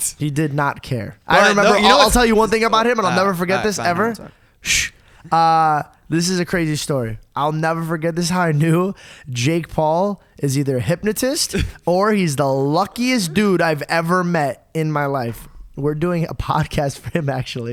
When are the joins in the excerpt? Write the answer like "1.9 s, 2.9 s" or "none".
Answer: none